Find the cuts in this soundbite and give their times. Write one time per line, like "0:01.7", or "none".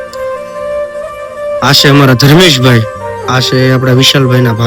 0:01.1